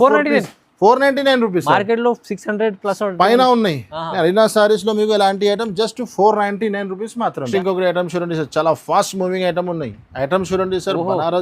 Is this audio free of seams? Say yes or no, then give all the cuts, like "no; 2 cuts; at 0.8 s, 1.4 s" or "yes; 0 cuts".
no; 1 cut; at 7.4 s